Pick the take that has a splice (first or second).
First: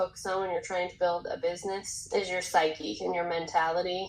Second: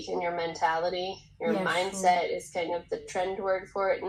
first